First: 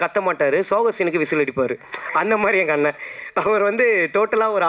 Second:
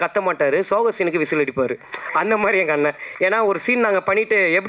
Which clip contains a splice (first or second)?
second